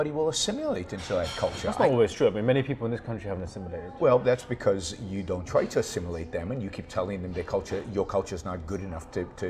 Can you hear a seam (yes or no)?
no